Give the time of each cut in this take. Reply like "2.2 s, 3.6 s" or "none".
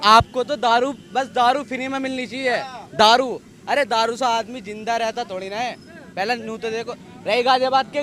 none